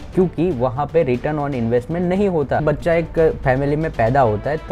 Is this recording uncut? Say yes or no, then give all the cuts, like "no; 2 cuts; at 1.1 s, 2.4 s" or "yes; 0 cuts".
no; 1 cut; at 2.6 s